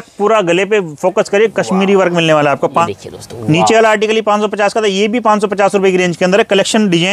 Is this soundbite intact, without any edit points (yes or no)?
no